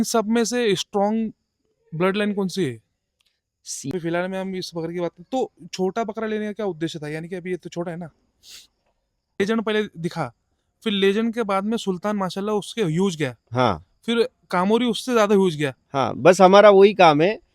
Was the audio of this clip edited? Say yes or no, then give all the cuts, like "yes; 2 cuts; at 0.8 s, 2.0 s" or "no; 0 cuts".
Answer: yes; 2 cuts; at 3.9 s, 9.4 s